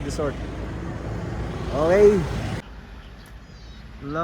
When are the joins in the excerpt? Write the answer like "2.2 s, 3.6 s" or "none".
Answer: 2.6 s